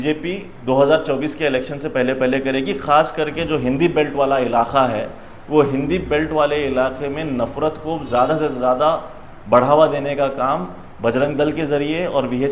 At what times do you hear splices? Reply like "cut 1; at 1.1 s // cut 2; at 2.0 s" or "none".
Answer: none